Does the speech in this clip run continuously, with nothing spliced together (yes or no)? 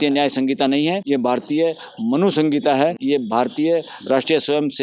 no